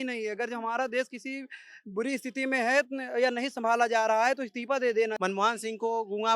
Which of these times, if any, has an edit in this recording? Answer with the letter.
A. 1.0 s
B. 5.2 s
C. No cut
B